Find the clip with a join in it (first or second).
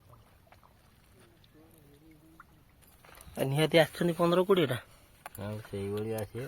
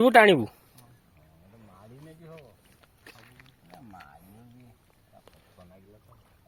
first